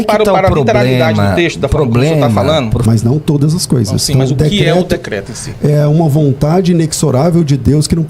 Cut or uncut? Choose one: cut